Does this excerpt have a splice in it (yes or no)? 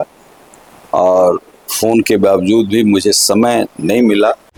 no